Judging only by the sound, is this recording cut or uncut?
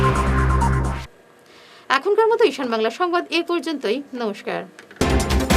uncut